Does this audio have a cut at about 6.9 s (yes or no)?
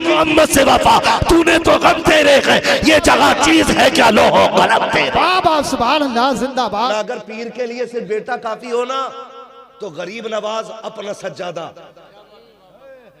yes